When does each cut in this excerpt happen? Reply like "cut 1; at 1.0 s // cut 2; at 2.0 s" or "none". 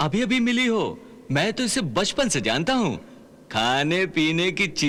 none